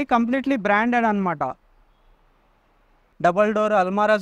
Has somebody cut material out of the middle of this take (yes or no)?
yes